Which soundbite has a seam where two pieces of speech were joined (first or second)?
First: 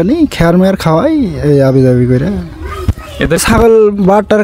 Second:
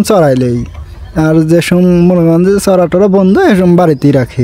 first